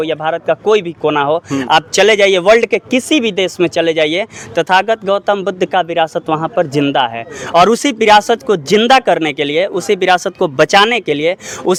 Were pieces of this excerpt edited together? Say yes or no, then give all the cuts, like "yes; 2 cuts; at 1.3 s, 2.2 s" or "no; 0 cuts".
no; 0 cuts